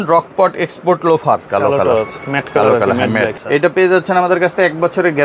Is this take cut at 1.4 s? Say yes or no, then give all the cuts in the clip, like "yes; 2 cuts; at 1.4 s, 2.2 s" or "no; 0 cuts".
yes; 2 cuts; at 1.4 s, 3.4 s